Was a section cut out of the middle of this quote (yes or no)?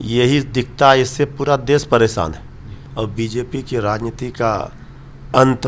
yes